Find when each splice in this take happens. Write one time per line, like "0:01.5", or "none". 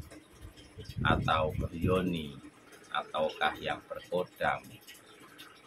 none